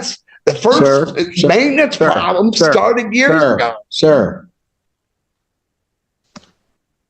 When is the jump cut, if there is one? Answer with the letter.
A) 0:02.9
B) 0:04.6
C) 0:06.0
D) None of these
D